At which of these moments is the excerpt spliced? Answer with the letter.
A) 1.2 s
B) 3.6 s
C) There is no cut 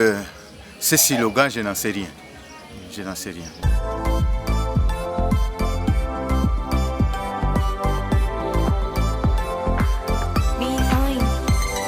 B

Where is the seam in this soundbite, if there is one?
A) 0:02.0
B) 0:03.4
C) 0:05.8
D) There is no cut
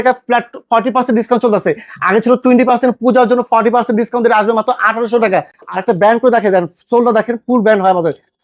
C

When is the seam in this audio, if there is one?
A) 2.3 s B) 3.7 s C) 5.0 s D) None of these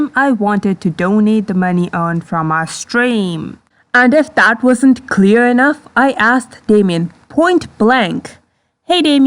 B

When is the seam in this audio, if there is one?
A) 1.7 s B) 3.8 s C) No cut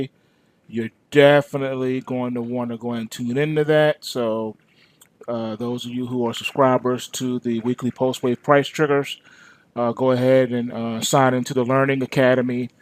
B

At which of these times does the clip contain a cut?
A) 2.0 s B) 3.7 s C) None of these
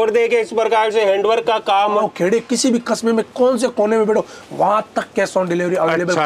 A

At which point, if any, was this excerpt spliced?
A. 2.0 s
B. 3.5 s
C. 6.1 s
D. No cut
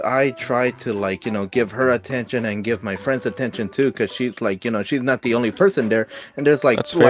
D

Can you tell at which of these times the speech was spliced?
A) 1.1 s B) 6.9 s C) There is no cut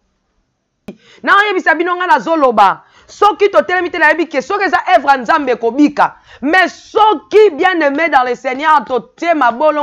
A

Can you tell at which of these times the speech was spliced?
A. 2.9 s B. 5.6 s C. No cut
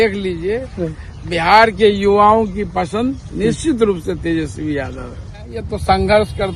B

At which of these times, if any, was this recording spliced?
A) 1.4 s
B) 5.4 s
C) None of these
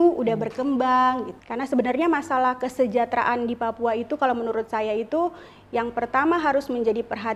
A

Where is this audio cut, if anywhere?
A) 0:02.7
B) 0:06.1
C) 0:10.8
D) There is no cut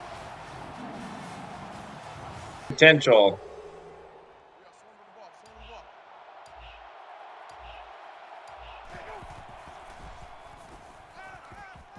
A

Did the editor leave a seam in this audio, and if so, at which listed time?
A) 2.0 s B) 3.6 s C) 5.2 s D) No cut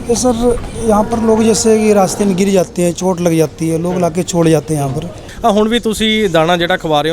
C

